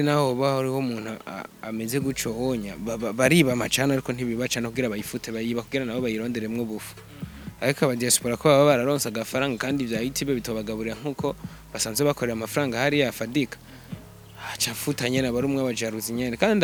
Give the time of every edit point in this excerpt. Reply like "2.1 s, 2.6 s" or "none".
none